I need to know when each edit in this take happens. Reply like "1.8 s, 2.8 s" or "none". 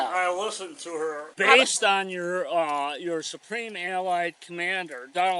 1.3 s

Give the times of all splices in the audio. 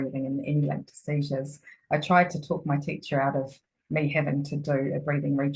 none

